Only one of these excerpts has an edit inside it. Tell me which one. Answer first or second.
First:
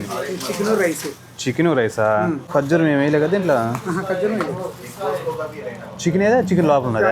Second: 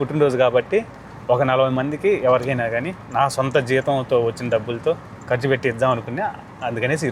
first